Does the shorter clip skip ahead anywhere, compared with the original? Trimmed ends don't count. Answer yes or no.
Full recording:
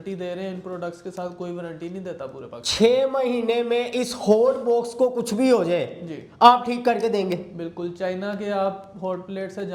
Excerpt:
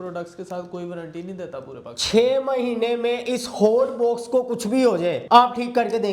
yes